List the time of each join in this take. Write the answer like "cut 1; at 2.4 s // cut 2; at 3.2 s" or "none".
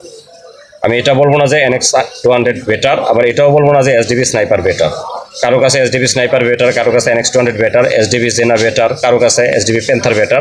none